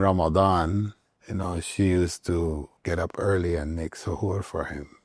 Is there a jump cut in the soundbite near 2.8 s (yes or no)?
yes